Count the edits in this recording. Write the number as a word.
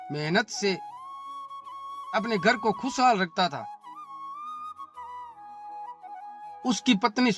two